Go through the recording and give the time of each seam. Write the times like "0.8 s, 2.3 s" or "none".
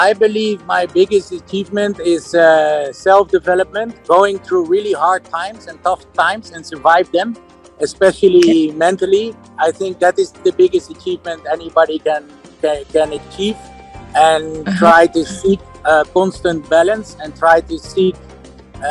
3.9 s, 9.4 s